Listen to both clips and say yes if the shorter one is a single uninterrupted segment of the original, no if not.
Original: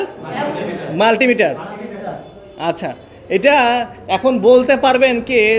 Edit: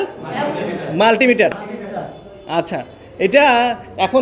no